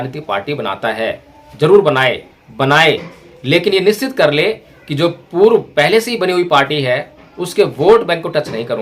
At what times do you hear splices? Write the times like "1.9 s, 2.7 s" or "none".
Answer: 2.3 s